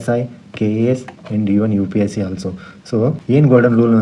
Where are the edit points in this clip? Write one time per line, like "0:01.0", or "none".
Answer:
none